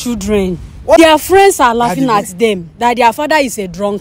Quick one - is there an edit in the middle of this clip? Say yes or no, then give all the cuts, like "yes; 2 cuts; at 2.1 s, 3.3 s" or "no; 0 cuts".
yes; 1 cut; at 1.0 s